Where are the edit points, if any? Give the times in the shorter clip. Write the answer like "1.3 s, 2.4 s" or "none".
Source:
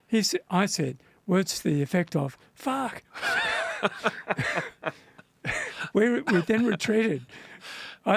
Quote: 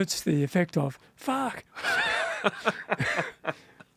none